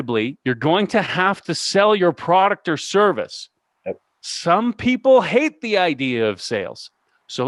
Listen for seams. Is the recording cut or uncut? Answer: uncut